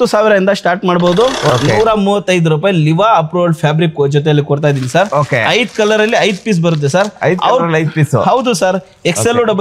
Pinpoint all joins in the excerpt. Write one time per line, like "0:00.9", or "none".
0:01.5